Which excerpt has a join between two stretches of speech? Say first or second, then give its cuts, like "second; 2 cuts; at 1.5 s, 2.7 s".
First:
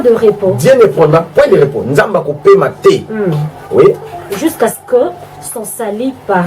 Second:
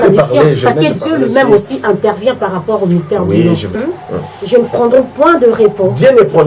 second; 1 cut; at 3.8 s